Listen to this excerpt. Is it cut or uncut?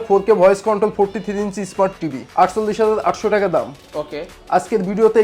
uncut